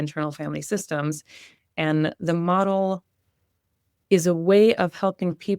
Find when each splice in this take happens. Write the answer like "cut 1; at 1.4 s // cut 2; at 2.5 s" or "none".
none